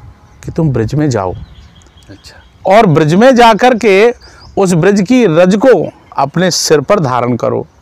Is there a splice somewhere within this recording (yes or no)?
no